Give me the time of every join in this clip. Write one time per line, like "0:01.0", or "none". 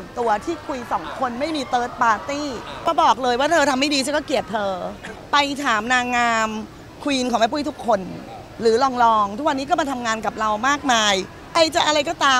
0:02.8
0:05.1
0:11.4